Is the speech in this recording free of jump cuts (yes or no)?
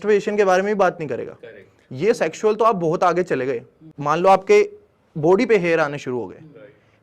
yes